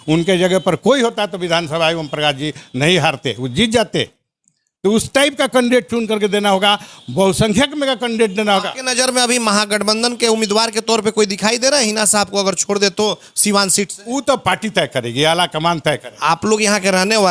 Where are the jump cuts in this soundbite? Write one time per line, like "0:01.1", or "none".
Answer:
none